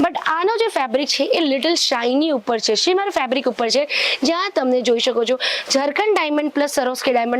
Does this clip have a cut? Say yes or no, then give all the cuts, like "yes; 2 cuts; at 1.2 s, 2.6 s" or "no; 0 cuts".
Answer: no; 0 cuts